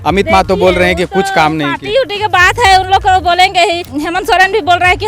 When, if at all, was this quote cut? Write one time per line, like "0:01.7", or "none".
0:03.9